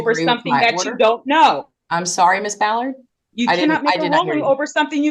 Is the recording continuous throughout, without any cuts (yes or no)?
yes